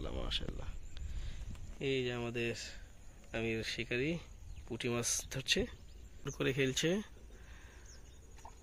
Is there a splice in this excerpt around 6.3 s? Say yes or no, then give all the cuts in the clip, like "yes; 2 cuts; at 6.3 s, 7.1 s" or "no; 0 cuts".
yes; 1 cut; at 6.3 s